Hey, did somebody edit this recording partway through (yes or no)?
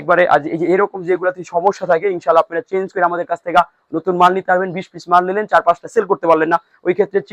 no